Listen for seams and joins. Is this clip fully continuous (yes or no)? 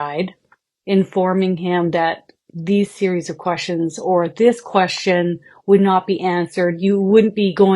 yes